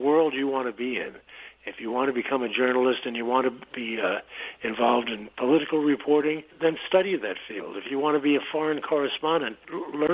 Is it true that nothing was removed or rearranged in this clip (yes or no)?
yes